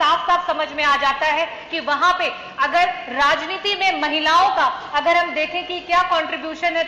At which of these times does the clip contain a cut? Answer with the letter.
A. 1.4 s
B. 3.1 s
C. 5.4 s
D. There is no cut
D